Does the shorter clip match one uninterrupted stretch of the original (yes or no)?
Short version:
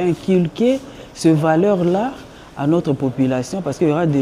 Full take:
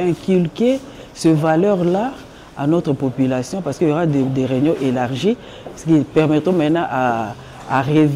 yes